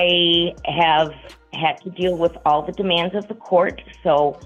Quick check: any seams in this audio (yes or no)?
no